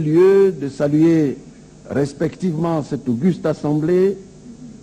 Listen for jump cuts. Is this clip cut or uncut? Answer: cut